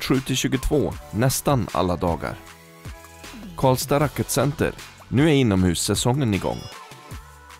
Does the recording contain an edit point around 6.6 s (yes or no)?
yes